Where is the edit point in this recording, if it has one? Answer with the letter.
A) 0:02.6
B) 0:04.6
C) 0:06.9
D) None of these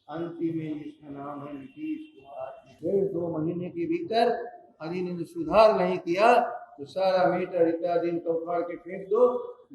A